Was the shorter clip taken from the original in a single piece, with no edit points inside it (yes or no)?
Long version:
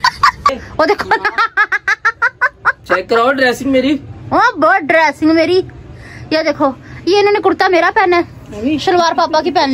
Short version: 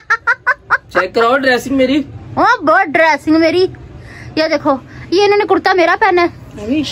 yes